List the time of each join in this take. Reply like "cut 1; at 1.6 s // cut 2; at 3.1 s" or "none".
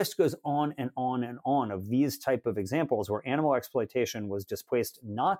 none